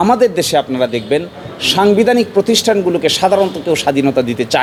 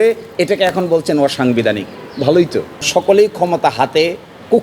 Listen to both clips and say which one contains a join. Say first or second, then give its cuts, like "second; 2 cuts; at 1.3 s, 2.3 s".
second; 1 cut; at 2.9 s